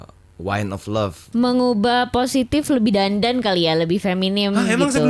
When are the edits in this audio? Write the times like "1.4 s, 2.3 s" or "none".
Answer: 1.2 s